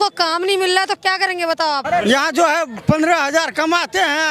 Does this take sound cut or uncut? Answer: cut